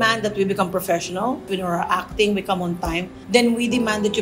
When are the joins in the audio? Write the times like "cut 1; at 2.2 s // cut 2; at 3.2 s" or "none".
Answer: cut 1; at 1.4 s